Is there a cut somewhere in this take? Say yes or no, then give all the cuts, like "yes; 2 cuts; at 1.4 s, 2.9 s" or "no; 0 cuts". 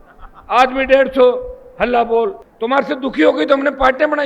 yes; 1 cut; at 2.4 s